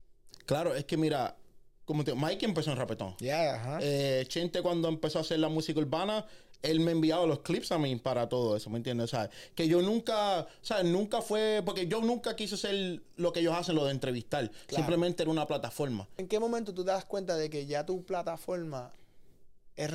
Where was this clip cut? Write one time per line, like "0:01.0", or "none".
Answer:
0:16.2